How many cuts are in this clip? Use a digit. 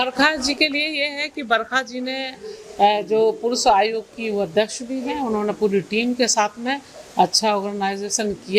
0